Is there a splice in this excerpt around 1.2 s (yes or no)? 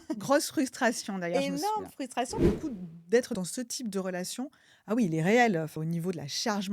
no